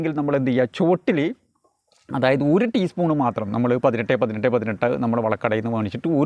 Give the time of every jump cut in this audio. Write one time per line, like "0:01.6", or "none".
none